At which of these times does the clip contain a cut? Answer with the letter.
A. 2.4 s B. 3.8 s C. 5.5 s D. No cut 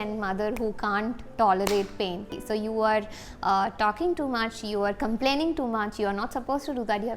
A